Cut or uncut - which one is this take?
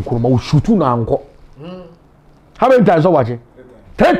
uncut